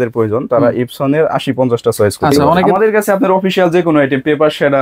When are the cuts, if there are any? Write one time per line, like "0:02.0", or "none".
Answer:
0:02.7

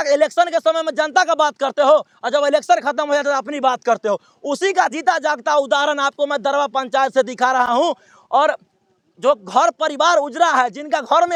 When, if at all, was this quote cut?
none

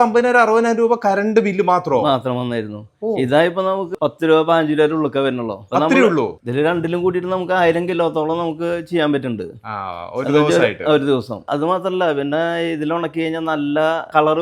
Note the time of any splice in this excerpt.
0:03.9
0:06.3
0:11.4

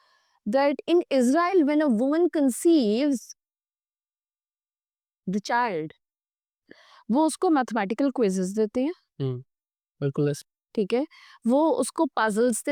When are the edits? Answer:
none

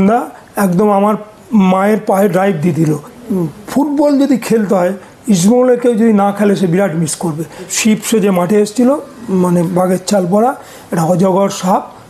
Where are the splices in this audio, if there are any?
0:03.1
0:07.7

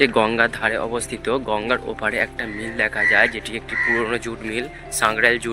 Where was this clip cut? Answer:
none

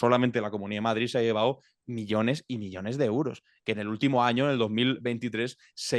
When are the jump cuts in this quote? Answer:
none

